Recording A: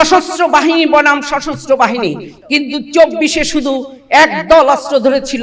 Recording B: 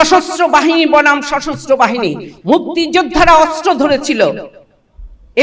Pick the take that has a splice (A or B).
A